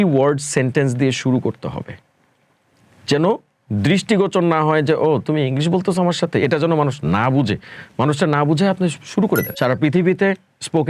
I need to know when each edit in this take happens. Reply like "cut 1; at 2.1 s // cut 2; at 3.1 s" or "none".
cut 1; at 9.5 s

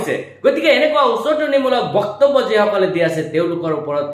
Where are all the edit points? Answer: none

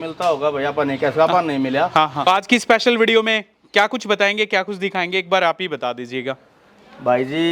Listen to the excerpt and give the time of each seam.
cut 1; at 2.3 s

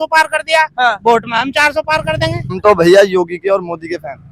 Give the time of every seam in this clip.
cut 1; at 2.5 s

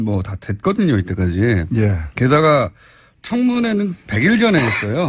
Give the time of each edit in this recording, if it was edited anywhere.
cut 1; at 3.2 s

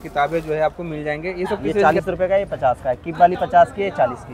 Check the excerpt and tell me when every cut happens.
cut 1; at 1.8 s

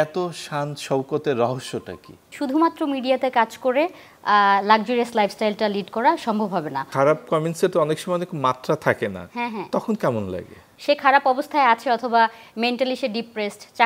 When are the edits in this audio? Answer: cut 1; at 2.2 s // cut 2; at 6.8 s // cut 3; at 10.6 s

